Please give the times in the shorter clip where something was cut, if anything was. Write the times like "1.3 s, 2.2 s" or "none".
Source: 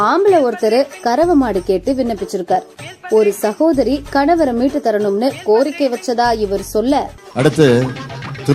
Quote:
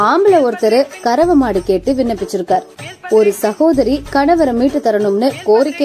none